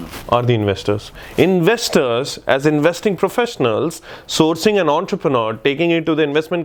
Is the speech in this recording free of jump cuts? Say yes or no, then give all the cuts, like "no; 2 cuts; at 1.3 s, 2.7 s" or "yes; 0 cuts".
yes; 0 cuts